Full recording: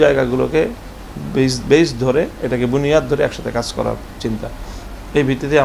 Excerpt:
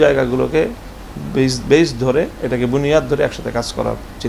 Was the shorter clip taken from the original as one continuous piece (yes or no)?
yes